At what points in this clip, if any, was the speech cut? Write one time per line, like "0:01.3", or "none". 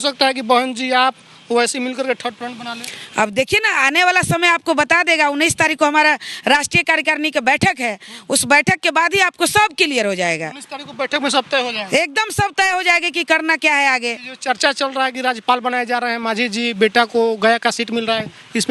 none

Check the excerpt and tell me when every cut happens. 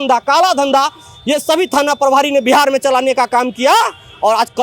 none

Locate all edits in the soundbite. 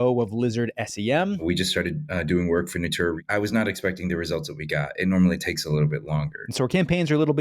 0:01.4
0:03.2
0:06.4

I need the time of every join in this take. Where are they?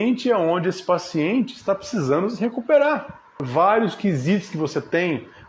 0:03.4

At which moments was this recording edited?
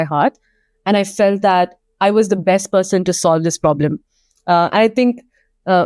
none

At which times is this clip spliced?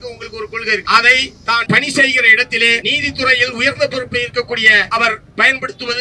0:00.8
0:01.6
0:02.8
0:04.9

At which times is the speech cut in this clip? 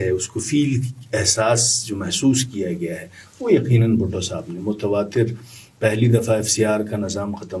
none

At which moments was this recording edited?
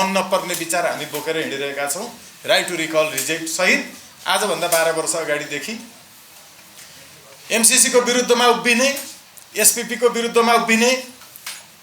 none

